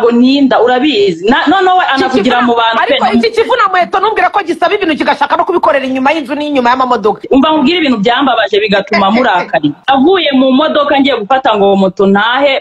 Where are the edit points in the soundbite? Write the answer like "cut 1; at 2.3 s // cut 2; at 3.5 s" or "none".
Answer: cut 1; at 7.2 s // cut 2; at 9.8 s

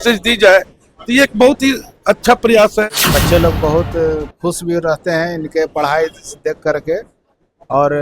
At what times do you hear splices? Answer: cut 1; at 2.9 s

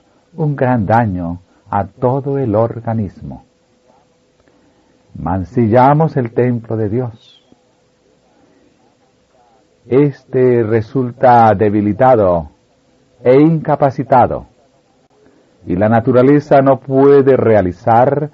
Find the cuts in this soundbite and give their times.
cut 1; at 10.0 s

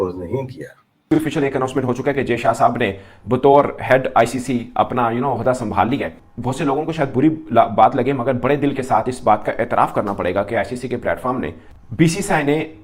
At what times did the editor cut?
cut 1; at 0.9 s

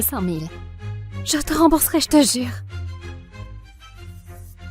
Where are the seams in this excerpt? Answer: cut 1; at 2.5 s

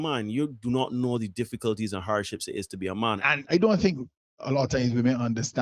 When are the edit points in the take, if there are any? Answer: cut 1; at 3.2 s

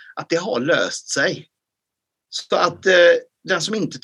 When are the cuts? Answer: none

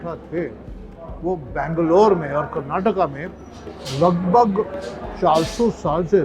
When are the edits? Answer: none

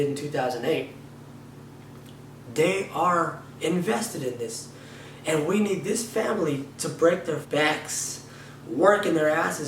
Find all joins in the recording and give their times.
cut 1; at 7.4 s

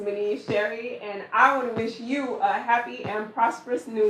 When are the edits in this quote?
none

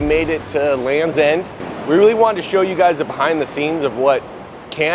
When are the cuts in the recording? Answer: cut 1; at 1.7 s

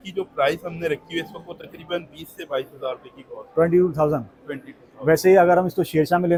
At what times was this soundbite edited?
none

